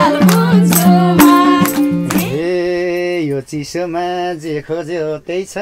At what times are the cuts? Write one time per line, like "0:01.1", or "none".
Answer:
0:02.3